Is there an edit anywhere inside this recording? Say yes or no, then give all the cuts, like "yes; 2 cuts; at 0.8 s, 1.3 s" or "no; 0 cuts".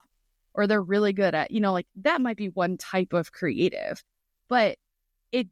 no; 0 cuts